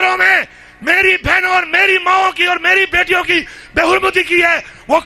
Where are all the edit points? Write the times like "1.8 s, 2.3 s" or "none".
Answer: none